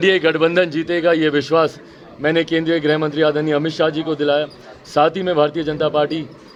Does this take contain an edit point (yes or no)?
no